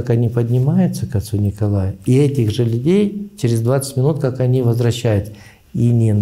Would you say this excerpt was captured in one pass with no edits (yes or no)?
yes